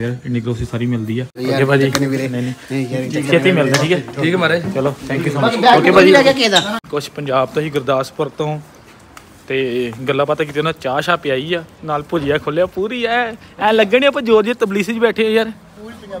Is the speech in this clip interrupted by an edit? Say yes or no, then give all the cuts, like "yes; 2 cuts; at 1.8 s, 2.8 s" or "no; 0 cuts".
no; 0 cuts